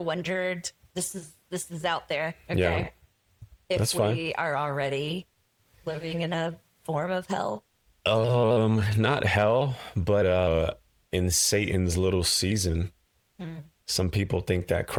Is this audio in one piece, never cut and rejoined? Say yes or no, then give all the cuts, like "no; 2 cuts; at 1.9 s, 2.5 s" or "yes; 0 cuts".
yes; 0 cuts